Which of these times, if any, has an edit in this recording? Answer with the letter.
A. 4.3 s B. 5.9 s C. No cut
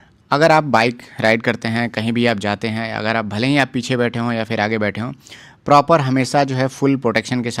C